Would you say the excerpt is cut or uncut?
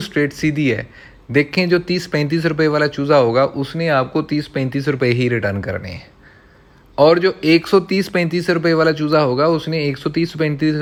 uncut